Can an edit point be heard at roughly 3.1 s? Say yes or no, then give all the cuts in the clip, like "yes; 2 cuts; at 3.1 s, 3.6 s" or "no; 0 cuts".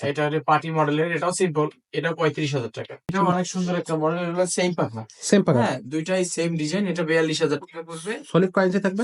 yes; 1 cut; at 3.1 s